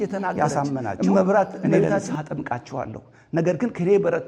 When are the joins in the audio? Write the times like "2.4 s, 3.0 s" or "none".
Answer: 2.1 s